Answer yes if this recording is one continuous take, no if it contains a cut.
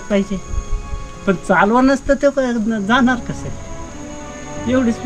yes